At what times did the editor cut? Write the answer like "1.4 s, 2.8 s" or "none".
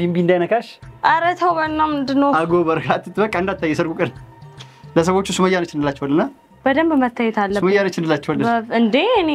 none